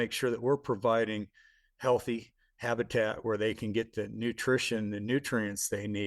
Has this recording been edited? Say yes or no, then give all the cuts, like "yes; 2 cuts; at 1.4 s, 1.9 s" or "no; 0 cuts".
no; 0 cuts